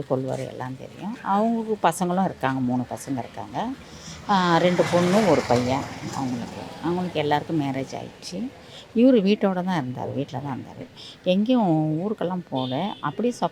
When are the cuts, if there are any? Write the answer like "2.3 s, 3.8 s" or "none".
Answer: none